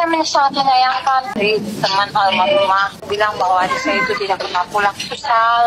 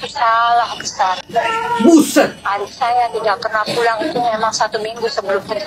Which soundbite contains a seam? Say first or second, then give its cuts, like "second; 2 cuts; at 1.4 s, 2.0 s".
first; 2 cuts; at 1.4 s, 3.1 s